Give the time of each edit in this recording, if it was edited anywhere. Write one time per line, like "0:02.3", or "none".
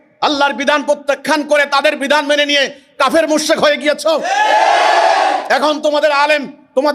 none